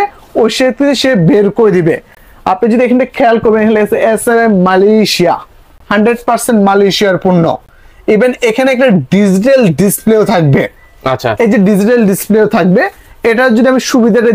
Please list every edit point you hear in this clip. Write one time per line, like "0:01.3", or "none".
none